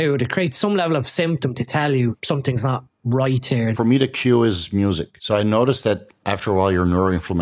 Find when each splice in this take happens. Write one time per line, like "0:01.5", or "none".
0:02.2
0:03.8
0:05.1